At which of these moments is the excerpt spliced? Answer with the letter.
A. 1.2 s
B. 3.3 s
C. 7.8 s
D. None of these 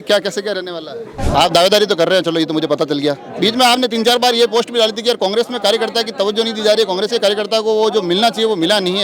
A